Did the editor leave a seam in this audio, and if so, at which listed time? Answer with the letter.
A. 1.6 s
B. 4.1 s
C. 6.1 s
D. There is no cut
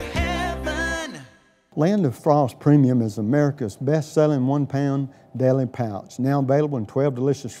A